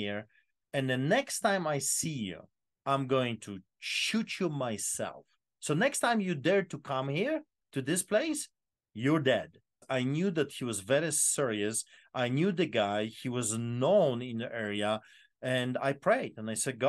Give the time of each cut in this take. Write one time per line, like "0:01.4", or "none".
0:09.8